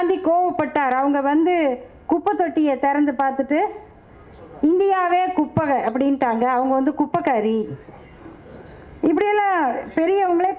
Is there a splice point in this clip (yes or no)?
no